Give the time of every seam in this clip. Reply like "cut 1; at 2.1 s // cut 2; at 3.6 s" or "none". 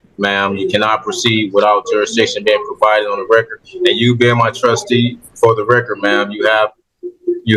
none